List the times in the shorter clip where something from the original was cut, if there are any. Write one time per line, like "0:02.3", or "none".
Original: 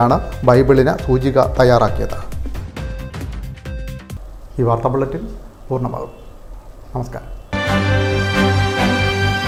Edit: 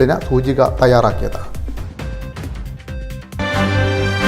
0:03.3